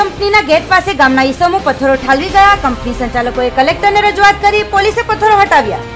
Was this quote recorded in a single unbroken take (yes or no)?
yes